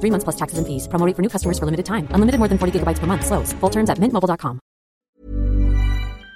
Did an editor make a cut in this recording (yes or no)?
yes